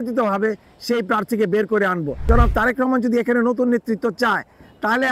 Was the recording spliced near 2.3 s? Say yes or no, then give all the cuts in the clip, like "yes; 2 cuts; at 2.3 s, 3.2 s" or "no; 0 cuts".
yes; 1 cut; at 2.3 s